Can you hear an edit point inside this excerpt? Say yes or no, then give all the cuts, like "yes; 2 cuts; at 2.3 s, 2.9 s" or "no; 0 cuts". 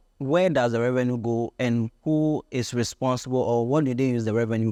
no; 0 cuts